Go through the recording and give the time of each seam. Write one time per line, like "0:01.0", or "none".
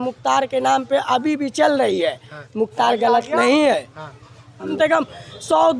0:04.7